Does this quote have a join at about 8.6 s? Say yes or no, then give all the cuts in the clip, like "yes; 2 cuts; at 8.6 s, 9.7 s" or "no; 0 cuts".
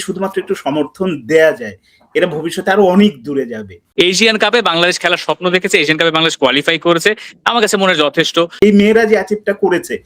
yes; 2 cuts; at 3.8 s, 8.6 s